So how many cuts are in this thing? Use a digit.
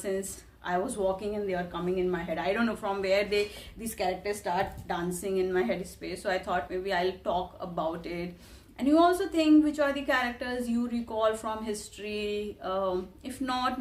0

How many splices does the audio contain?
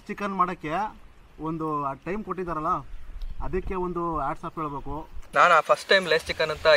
1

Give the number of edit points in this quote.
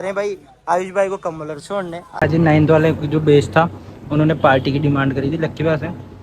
1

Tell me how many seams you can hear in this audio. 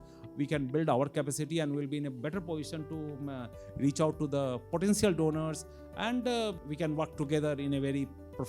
1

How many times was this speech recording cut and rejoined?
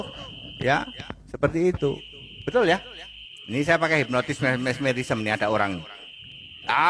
0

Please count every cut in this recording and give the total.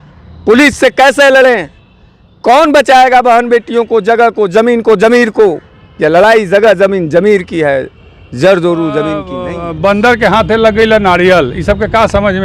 1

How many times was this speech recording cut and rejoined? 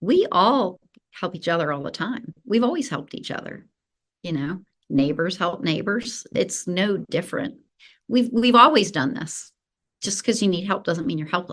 1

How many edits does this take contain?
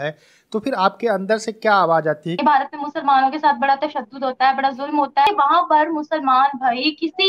2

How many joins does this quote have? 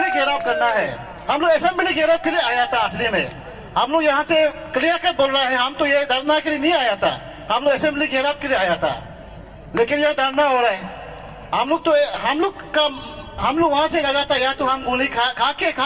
0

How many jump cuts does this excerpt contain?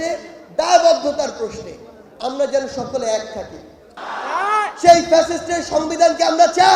1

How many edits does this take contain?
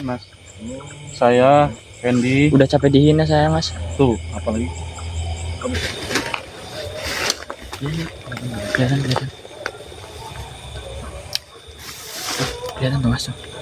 1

